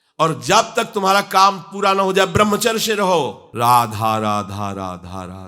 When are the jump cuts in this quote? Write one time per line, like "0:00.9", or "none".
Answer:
0:03.5